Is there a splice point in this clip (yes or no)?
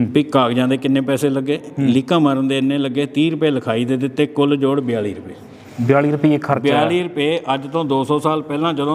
no